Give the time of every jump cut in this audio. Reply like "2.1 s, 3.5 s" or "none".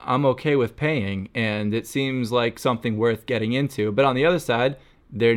none